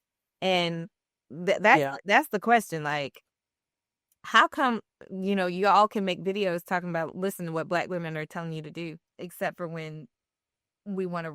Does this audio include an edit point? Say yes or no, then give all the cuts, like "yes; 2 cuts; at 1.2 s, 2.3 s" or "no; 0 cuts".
yes; 1 cut; at 9.1 s